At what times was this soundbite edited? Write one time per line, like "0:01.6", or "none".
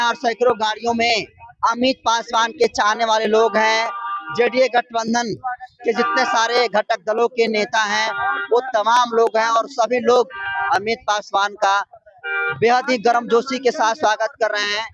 none